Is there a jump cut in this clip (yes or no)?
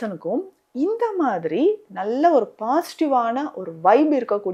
no